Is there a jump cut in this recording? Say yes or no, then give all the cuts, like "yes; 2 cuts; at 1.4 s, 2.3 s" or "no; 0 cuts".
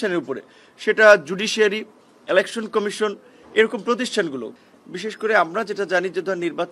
yes; 1 cut; at 4.5 s